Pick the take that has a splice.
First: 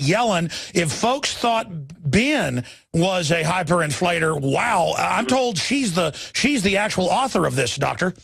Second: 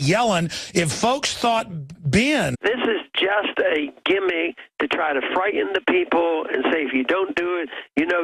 first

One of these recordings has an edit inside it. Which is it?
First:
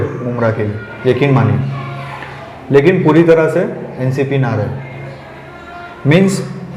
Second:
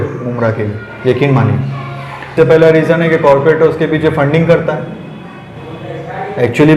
second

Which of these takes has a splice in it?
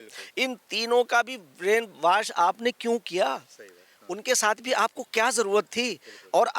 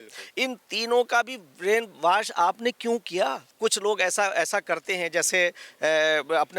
second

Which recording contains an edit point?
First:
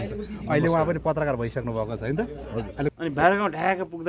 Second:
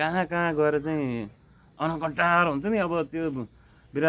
first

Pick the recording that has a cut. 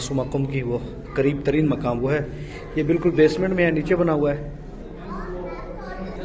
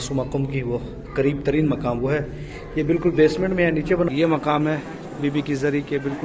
second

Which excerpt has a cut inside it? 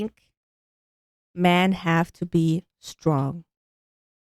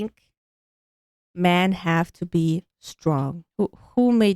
second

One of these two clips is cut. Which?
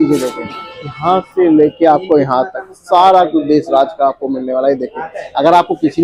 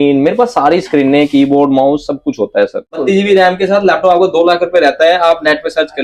second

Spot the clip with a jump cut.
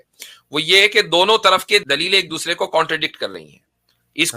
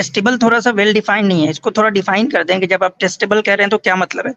first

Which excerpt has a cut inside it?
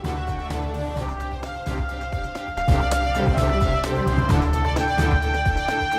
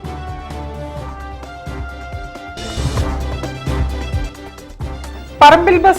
second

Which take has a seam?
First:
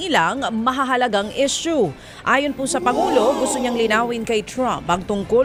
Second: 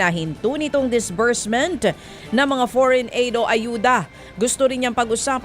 second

